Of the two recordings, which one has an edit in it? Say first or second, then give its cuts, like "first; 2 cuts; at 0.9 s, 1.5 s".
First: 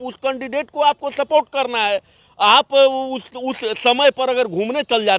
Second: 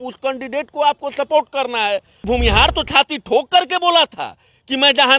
second; 1 cut; at 2.3 s